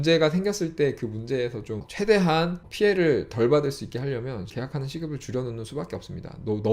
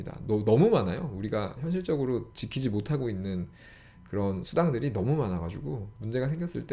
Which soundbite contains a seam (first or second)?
first